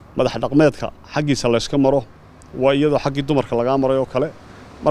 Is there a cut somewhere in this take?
no; 0 cuts

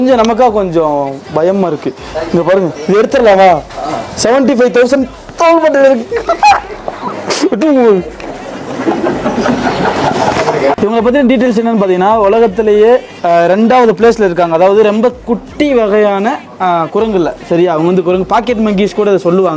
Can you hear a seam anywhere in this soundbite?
yes; 2 cuts; at 10.8 s, 13.1 s

